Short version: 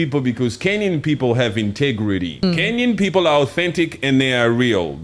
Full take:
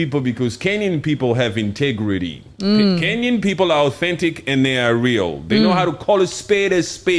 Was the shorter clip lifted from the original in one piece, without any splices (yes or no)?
no